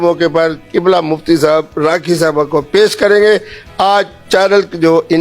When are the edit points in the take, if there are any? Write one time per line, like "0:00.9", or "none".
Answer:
none